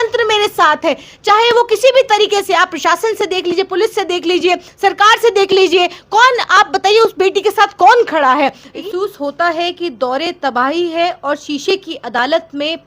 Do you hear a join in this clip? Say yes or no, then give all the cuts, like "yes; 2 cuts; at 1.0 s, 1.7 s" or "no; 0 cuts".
yes; 1 cut; at 8.7 s